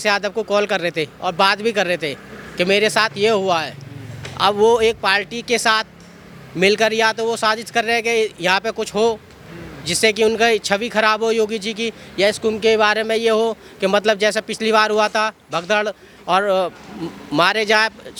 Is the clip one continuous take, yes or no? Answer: yes